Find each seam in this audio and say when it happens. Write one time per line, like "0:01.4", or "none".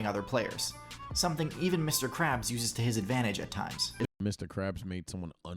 0:04.1